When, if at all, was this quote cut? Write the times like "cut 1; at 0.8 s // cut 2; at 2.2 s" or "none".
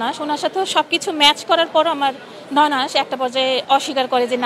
none